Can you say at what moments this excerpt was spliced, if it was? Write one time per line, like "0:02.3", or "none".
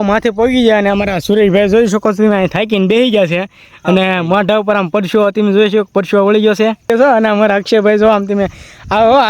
0:06.9